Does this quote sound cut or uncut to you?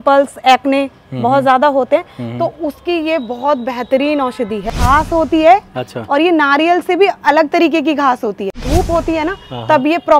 cut